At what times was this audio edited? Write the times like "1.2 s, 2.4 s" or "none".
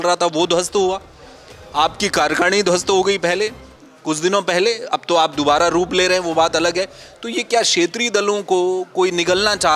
none